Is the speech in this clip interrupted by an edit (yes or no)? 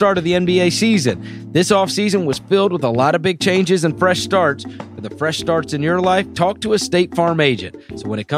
no